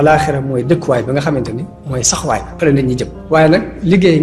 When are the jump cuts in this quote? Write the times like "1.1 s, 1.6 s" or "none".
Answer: 3.1 s